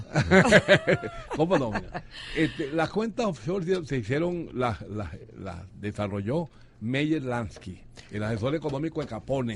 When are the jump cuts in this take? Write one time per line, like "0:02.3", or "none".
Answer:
none